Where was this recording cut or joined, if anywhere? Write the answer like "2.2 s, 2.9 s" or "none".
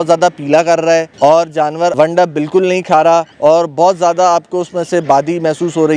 1.1 s, 1.9 s, 3.3 s